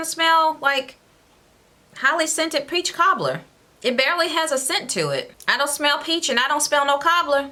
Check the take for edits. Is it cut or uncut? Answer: uncut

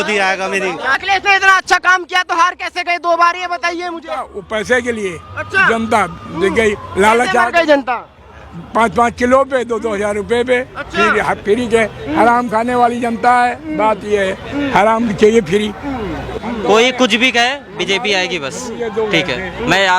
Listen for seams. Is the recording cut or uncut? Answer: cut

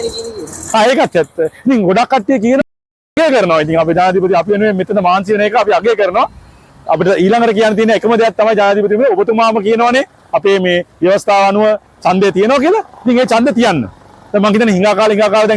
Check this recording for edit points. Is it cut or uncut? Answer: cut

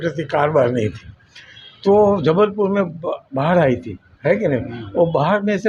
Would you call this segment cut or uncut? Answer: uncut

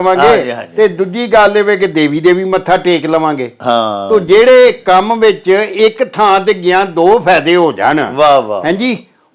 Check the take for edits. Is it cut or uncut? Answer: uncut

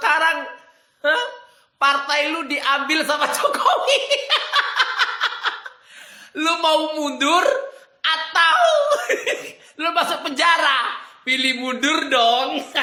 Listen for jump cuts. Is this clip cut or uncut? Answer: uncut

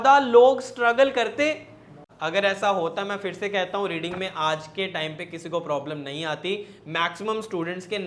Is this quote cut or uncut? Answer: cut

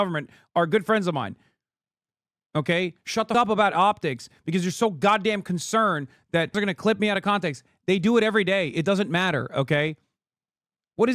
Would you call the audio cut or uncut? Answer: cut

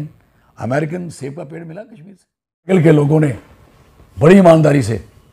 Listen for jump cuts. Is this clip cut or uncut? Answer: cut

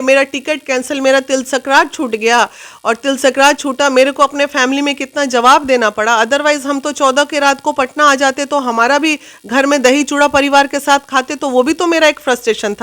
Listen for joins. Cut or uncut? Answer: uncut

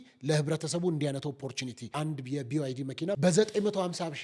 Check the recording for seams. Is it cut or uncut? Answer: cut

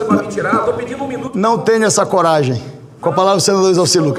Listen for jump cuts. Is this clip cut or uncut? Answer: uncut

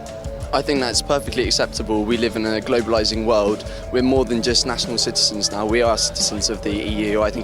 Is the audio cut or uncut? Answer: uncut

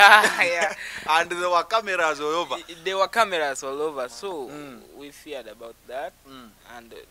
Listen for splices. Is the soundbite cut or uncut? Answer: uncut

